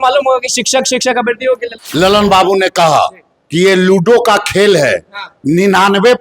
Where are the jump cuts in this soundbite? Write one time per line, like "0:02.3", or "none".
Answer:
0:01.7